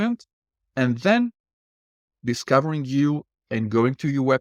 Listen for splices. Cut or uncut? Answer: uncut